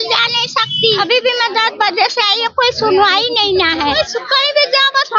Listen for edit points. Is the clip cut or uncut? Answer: cut